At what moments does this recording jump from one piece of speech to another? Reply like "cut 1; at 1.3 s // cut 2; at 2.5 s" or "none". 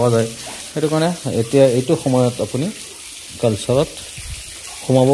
none